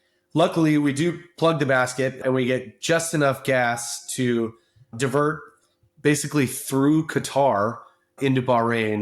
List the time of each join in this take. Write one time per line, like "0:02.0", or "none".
0:02.2
0:04.9
0:08.1